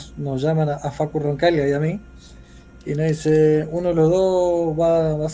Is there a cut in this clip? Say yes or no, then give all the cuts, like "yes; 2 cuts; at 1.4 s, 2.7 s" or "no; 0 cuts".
no; 0 cuts